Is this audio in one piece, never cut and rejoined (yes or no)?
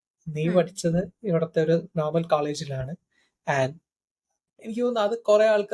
yes